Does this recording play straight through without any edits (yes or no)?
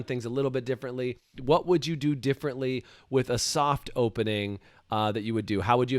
no